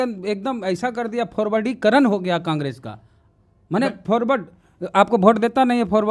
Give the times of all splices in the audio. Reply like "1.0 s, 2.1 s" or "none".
none